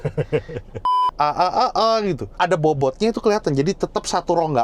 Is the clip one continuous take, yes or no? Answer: no